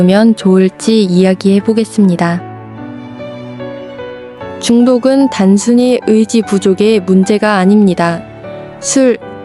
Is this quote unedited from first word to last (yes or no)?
yes